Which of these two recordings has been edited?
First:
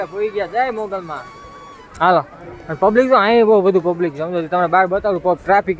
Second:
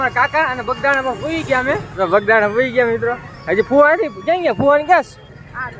second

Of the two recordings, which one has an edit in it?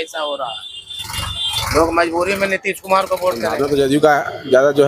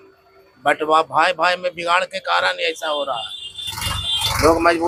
first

